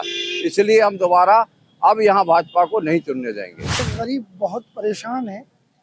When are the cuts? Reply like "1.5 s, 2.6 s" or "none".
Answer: 3.8 s